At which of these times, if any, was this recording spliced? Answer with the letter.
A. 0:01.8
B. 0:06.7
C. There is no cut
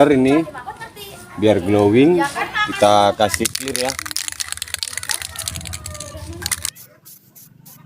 B